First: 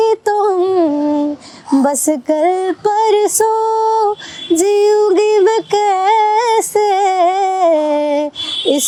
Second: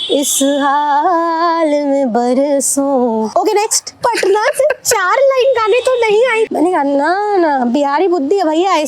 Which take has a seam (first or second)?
second